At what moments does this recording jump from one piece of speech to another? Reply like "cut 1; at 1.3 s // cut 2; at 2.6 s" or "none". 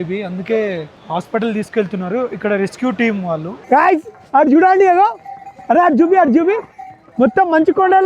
cut 1; at 0.9 s // cut 2; at 3.5 s